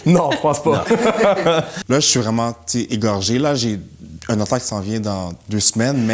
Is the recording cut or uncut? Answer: cut